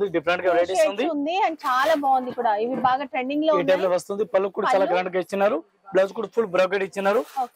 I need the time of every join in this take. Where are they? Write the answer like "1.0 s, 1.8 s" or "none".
none